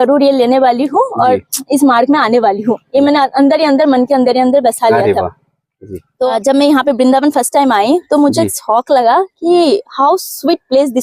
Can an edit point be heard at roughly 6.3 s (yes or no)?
yes